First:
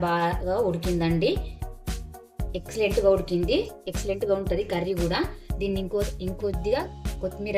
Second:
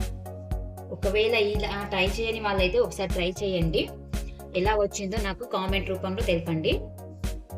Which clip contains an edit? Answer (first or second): second